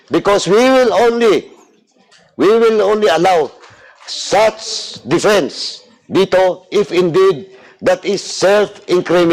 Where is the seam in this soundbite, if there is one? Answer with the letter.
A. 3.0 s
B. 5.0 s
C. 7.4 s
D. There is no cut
D